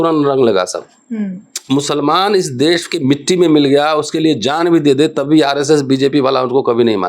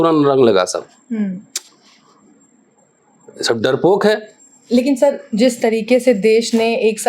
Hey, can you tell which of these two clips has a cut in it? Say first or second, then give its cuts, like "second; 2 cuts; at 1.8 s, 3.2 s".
first; 1 cut; at 1.6 s